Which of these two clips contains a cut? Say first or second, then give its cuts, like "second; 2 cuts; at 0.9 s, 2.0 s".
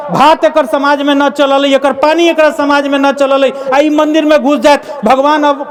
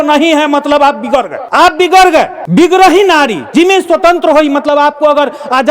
second; 2 cuts; at 1.4 s, 2.4 s